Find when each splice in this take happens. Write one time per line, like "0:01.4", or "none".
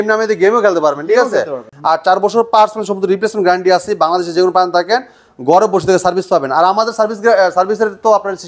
0:01.6